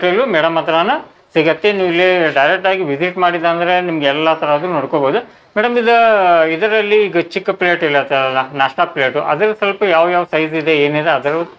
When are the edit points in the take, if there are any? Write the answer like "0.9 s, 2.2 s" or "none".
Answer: none